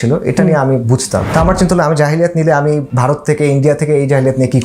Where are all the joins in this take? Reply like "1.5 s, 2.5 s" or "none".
1.3 s, 2.9 s